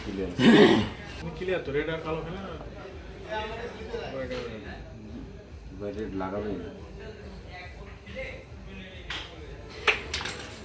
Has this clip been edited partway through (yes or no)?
yes